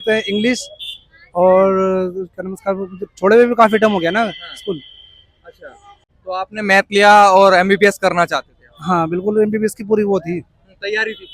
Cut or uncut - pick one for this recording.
cut